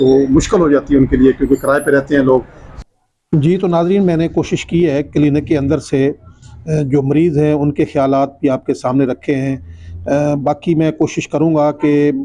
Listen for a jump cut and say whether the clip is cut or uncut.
uncut